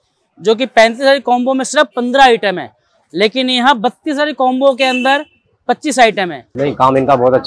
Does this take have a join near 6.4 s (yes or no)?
yes